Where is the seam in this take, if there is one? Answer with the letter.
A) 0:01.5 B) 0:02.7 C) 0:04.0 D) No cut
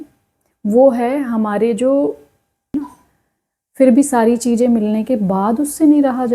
B